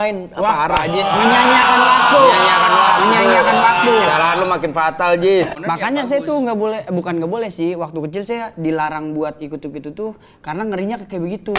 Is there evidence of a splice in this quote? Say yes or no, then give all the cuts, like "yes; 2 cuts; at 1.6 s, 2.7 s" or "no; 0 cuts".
yes; 1 cut; at 5.5 s